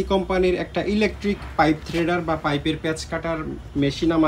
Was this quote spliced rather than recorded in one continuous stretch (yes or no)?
no